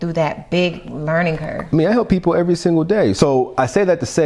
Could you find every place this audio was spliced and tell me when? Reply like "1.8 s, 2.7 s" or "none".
3.1 s